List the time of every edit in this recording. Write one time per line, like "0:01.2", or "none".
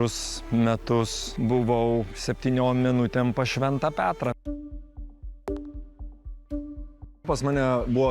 0:01.2
0:07.2

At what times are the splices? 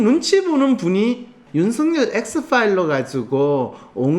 0:01.4

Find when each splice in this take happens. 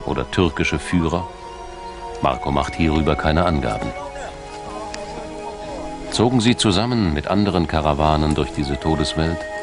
none

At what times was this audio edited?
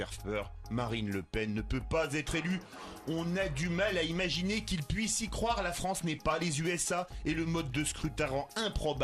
0:01.2

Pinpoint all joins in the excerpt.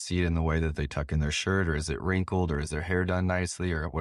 none

